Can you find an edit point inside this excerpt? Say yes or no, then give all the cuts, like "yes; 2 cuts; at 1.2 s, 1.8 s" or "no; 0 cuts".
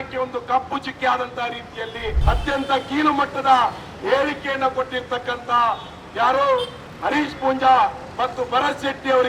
yes; 1 cut; at 2.1 s